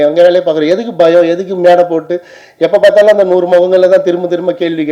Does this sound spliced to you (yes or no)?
no